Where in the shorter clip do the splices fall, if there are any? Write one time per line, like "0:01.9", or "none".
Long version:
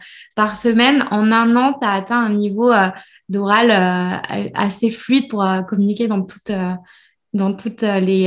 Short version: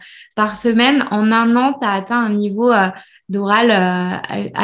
none